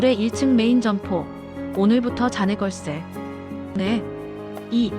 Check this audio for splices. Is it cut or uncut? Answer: cut